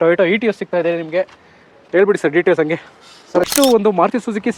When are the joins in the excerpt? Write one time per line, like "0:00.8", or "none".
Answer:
0:03.5